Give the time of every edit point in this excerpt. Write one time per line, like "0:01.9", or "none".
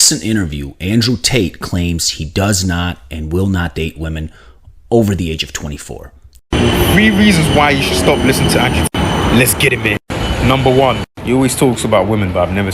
0:06.5